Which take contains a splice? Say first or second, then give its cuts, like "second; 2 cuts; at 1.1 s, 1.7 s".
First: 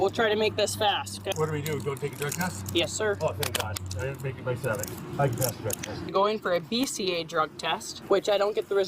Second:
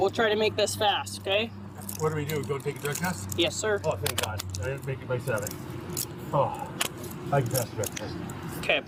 first; 4 cuts; at 1.3 s, 4.9 s, 6.1 s, 7.9 s